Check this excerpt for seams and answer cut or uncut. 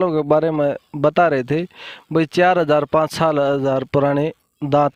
uncut